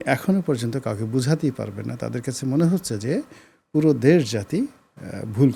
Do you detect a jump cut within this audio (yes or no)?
no